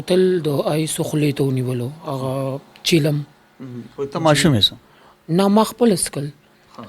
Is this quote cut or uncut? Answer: uncut